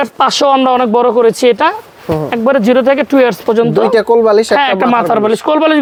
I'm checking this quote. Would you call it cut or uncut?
uncut